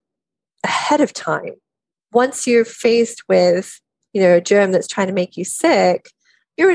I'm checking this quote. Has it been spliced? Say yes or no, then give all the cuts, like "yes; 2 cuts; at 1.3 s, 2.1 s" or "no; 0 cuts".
no; 0 cuts